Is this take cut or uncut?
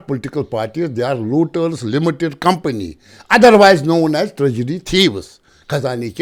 uncut